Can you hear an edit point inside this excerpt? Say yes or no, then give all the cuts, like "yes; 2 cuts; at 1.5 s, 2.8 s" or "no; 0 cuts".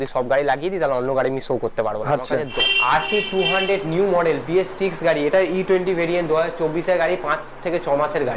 yes; 1 cut; at 2.5 s